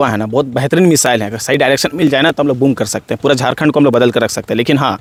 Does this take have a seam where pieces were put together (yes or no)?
no